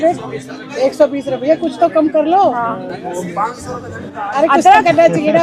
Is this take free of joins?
yes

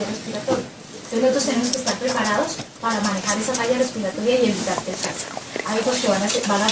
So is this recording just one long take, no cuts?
yes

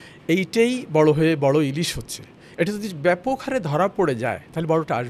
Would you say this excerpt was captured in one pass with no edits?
yes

